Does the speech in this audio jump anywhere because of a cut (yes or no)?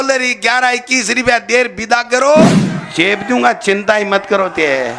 yes